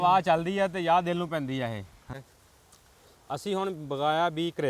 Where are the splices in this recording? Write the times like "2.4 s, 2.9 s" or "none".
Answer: 2.1 s